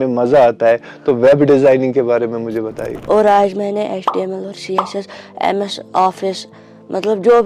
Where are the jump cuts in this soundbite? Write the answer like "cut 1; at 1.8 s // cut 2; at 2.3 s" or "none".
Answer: cut 1; at 2.9 s